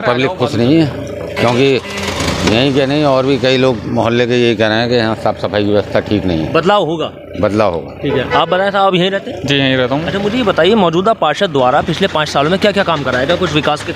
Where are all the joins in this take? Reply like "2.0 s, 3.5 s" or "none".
none